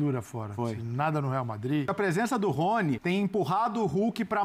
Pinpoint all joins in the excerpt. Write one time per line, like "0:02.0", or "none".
0:01.9
0:03.0